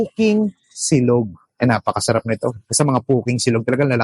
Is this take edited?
no; 0 cuts

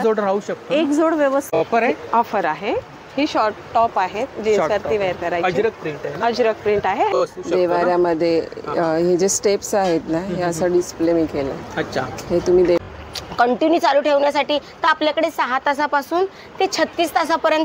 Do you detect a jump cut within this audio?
yes; 3 cuts; at 1.6 s, 7.1 s, 12.8 s

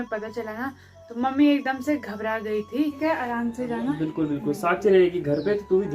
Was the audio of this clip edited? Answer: yes; 1 cut; at 3.0 s

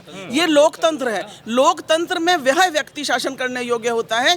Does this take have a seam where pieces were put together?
no; 0 cuts

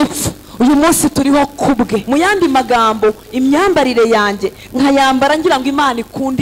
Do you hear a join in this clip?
yes; 1 cut; at 2.0 s

